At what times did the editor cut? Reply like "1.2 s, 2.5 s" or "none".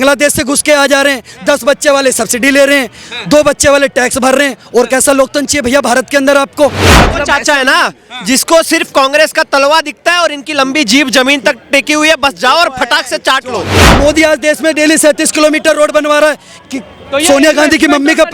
7.0 s, 13.8 s